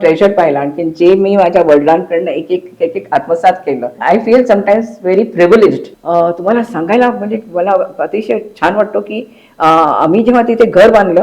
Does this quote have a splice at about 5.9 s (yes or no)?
yes